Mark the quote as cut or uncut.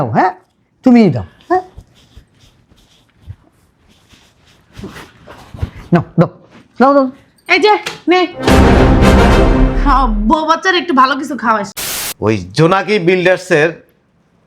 cut